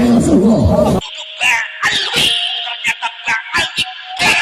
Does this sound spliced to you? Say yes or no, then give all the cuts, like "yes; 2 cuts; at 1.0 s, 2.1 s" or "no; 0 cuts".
yes; 1 cut; at 2.0 s